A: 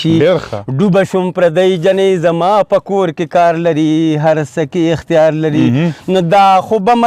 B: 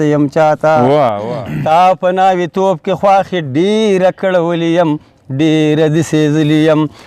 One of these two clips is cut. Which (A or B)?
B